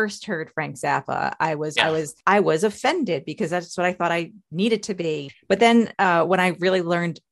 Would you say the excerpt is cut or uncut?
cut